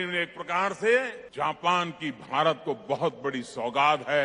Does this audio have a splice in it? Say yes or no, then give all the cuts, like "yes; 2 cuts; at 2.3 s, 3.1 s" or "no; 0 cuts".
yes; 1 cut; at 1.2 s